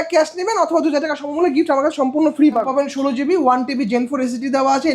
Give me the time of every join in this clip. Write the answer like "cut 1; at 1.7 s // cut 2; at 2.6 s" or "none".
cut 1; at 2.7 s